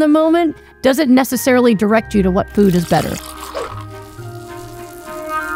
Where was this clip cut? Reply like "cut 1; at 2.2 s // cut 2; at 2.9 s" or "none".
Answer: cut 1; at 3.3 s